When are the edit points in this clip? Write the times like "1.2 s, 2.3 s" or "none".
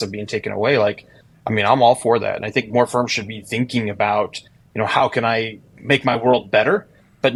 none